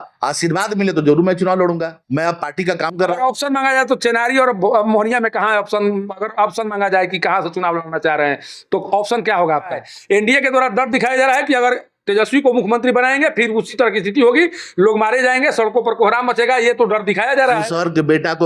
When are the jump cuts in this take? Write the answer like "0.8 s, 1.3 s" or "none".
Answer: 1.9 s, 9.9 s, 17.7 s